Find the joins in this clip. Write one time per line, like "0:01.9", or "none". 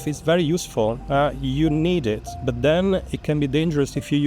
none